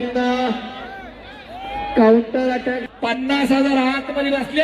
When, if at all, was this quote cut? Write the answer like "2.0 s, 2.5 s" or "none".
2.8 s